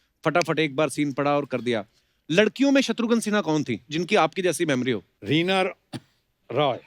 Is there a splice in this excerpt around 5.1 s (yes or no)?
yes